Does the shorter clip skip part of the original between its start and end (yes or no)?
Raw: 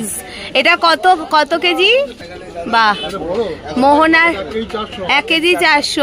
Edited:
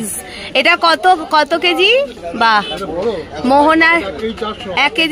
yes